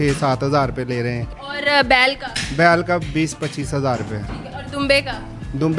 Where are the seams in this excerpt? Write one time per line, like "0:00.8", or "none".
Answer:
none

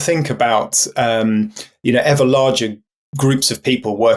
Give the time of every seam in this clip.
none

